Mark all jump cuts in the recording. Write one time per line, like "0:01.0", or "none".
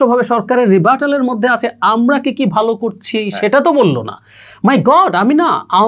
none